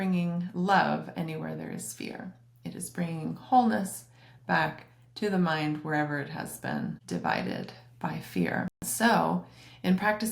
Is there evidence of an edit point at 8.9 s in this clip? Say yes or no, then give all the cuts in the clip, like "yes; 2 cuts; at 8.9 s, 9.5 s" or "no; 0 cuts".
yes; 1 cut; at 8.9 s